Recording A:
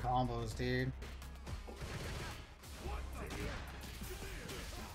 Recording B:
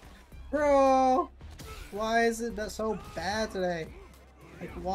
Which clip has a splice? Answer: A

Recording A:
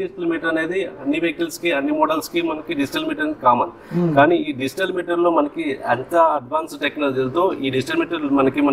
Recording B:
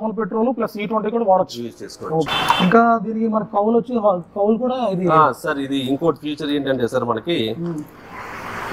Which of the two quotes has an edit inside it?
B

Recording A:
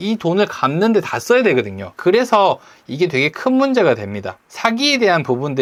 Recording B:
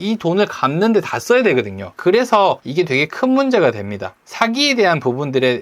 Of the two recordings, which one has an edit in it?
B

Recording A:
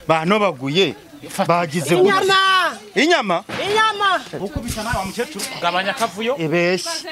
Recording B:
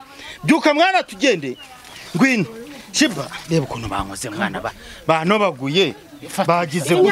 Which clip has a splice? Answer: A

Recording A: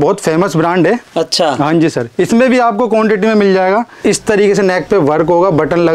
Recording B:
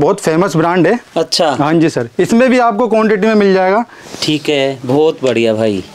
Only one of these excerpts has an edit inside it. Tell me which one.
A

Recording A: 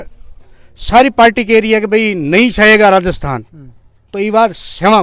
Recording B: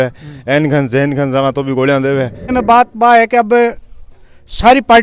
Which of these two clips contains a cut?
B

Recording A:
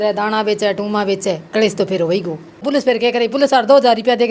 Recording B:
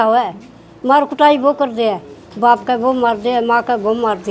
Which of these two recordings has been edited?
A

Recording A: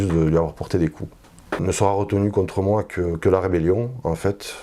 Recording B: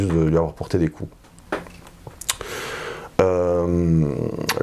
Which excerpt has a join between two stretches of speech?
A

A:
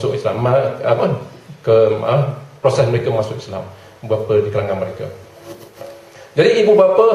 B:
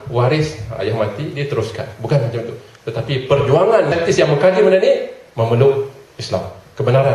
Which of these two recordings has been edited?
B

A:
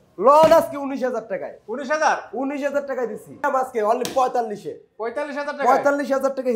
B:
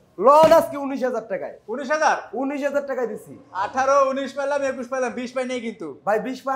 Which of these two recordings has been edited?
A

